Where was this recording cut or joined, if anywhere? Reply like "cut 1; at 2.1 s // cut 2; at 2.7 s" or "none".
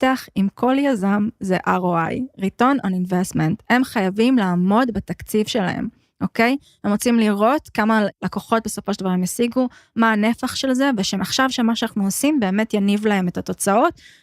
cut 1; at 8.2 s // cut 2; at 11.2 s